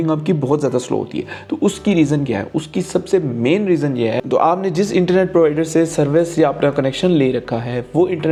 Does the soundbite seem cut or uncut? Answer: uncut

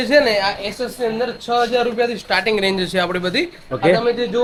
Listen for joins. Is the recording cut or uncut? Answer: uncut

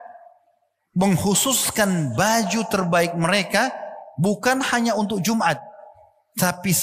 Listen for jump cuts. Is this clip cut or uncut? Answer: uncut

